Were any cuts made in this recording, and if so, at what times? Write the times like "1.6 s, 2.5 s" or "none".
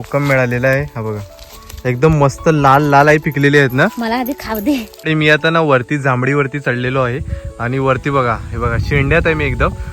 5.1 s